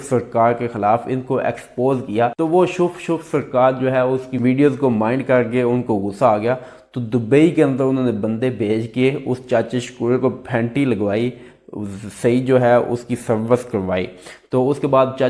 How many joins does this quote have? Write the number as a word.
zero